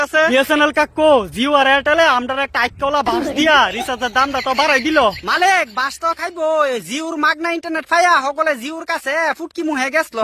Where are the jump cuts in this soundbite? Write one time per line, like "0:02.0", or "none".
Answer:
none